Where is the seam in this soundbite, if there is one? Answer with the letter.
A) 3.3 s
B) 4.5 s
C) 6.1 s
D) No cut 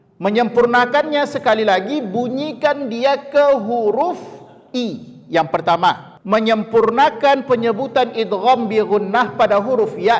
C